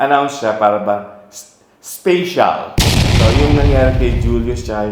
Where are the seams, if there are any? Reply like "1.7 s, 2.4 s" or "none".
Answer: 3.1 s